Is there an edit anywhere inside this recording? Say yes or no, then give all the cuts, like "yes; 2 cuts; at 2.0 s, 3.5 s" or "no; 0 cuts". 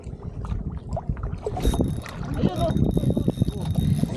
no; 0 cuts